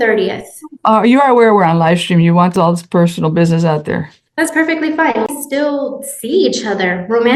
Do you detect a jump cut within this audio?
yes; 1 cut; at 5.3 s

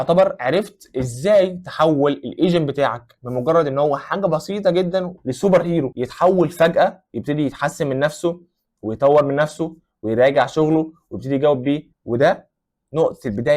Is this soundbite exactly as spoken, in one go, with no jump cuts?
no; 2 cuts; at 5.1 s, 11.9 s

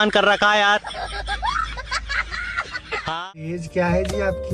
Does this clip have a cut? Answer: yes; 1 cut; at 3.6 s

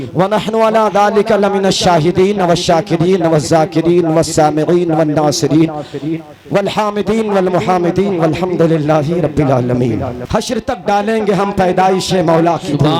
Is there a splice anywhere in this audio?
yes; 1 cut; at 10.2 s

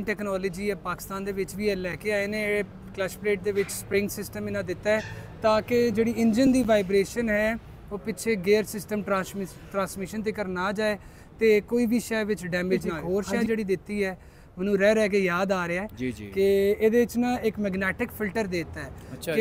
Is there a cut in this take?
yes; 1 cut; at 12.9 s

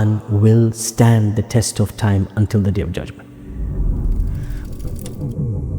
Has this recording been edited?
no; 0 cuts

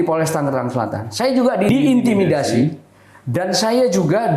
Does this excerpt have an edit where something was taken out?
yes; 1 cut; at 1.7 s

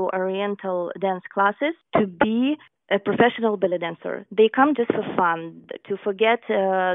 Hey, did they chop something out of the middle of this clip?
yes; 2 cuts; at 1.8 s, 2.7 s

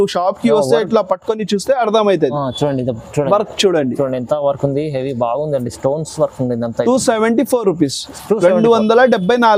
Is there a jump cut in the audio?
no; 0 cuts

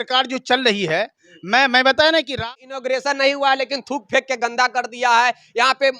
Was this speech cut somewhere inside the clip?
yes; 1 cut; at 2.4 s

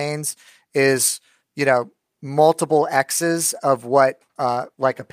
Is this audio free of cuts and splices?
yes; 0 cuts

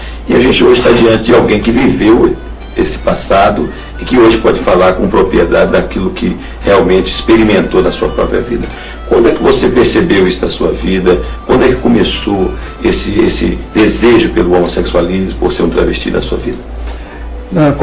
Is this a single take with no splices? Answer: no; 1 cut; at 16.2 s

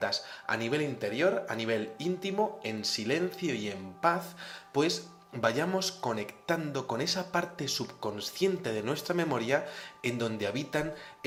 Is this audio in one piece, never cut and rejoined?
yes; 0 cuts

